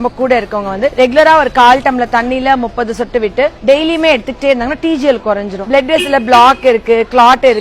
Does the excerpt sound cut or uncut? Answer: cut